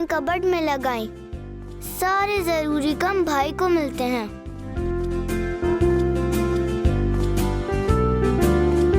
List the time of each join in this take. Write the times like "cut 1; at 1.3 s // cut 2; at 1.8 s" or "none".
none